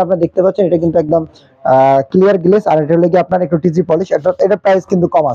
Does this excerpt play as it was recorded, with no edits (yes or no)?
yes